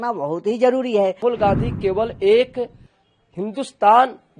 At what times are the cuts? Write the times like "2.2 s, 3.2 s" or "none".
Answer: 1.2 s